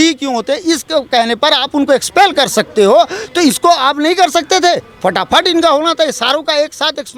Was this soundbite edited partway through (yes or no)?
no